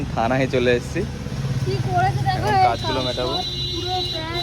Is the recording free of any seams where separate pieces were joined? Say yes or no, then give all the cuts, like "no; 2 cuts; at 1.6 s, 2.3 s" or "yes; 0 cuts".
no; 1 cut; at 1.2 s